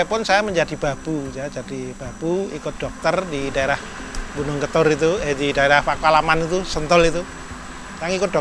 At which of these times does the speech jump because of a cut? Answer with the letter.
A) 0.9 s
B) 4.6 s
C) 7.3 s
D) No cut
D